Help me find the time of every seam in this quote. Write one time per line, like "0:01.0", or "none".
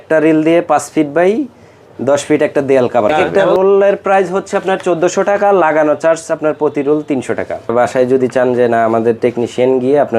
0:03.1
0:07.7